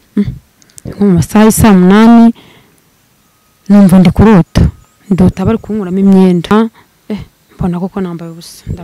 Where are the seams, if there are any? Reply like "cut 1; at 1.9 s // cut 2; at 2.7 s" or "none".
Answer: cut 1; at 6.5 s